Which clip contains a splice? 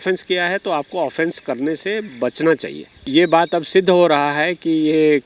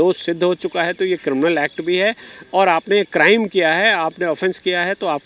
first; 1 cut; at 3.0 s

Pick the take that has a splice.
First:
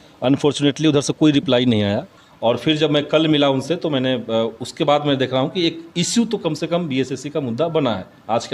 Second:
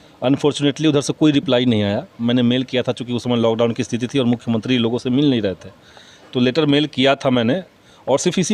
first; 1 cut; at 2.1 s

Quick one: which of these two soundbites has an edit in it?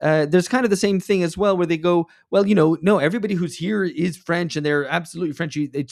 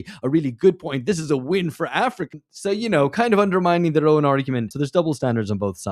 second; 1 cut; at 4.7 s

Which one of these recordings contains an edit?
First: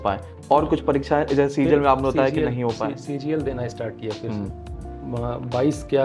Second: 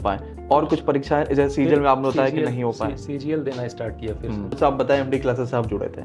second; 1 cut; at 4.6 s

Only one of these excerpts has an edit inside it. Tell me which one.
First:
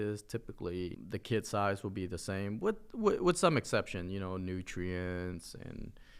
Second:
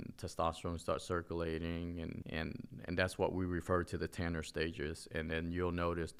first; 1 cut; at 1.0 s

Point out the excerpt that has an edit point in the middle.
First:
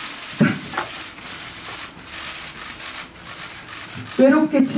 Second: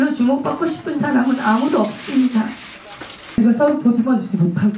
second; 1 cut; at 3.4 s

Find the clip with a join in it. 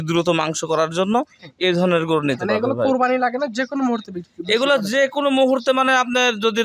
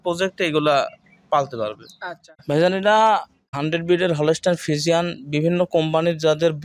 second; 2 cuts; at 2.3 s, 3.4 s

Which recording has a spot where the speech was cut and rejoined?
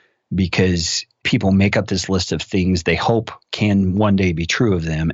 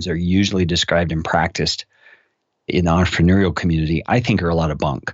first; 1 cut; at 1.2 s

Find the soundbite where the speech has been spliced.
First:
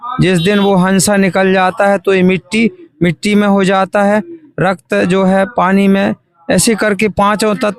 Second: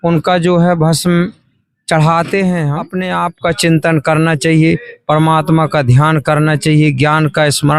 second; 1 cut; at 2.9 s

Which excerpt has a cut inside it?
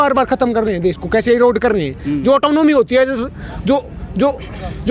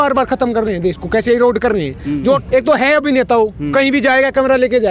second; 1 cut; at 2.4 s

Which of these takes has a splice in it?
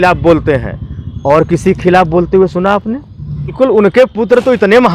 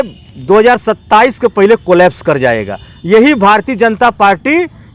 first; 1 cut; at 3.5 s

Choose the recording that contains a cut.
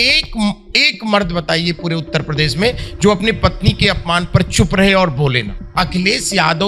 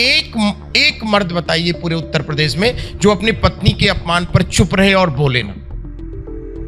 first; 1 cut; at 5.6 s

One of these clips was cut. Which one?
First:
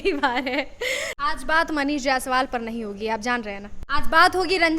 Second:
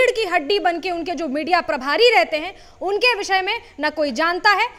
first; 2 cuts; at 1.1 s, 3.7 s

